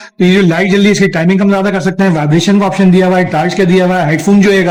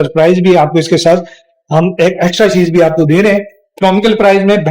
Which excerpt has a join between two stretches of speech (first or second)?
second